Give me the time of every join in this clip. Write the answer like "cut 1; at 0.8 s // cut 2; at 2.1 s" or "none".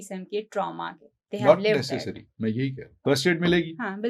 cut 1; at 3.0 s